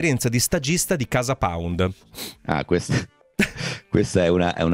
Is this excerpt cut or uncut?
uncut